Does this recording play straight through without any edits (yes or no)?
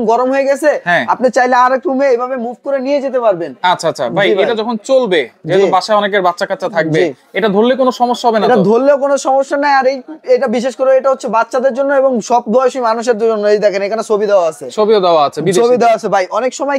yes